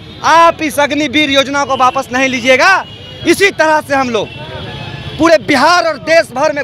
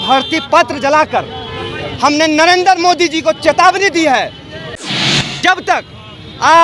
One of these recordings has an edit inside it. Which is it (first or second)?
second